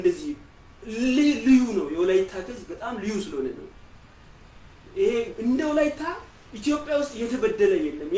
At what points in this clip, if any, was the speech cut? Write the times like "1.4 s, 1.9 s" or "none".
none

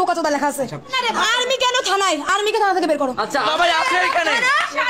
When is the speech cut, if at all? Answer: 0.9 s, 3.5 s

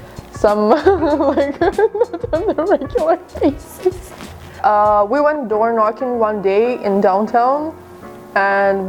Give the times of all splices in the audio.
none

